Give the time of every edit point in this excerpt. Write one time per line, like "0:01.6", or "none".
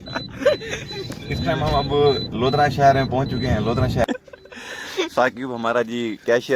0:04.0